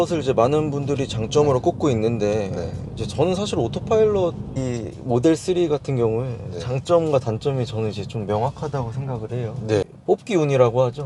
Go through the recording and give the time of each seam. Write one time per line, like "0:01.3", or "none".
0:04.6
0:09.9